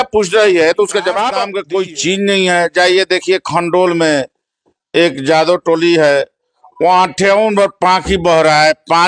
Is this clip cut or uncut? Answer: cut